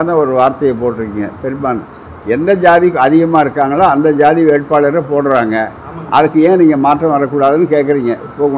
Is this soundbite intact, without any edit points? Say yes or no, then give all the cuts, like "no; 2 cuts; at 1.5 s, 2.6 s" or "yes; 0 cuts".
yes; 0 cuts